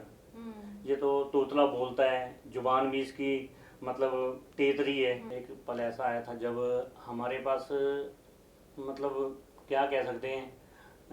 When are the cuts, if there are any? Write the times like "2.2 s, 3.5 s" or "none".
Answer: 5.3 s

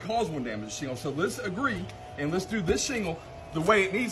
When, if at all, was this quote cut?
none

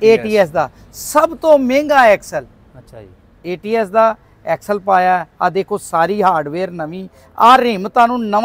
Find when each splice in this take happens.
none

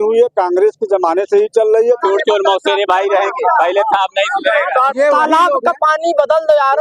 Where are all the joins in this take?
2.0 s, 4.9 s

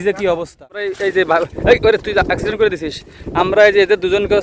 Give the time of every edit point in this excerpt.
0.9 s

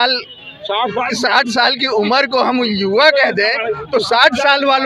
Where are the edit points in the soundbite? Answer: none

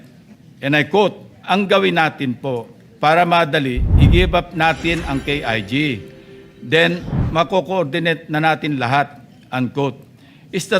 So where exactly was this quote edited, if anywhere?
1.3 s

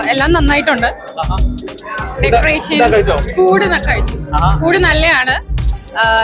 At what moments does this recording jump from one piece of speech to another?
none

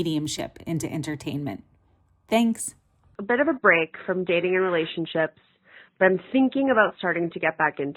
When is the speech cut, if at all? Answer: 3.1 s

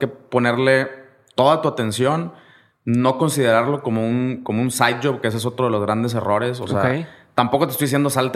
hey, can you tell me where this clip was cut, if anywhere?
none

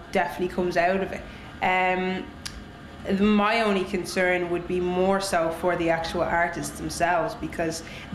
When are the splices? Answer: none

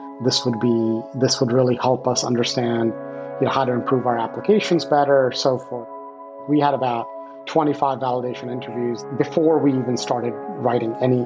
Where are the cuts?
6.1 s, 9.1 s

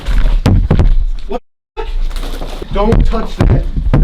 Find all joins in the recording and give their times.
2.6 s

